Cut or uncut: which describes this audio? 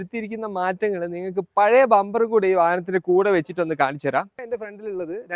uncut